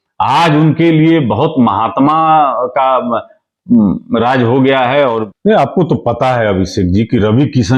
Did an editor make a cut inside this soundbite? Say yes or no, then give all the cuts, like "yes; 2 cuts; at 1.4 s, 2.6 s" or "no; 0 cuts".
yes; 1 cut; at 5.3 s